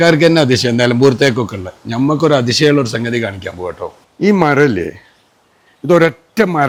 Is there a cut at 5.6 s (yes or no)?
no